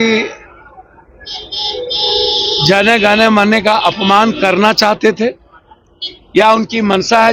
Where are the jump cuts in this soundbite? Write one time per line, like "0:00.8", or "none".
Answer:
none